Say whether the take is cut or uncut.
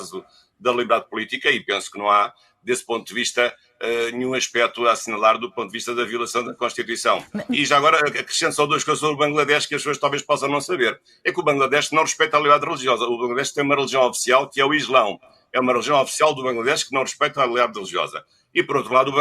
cut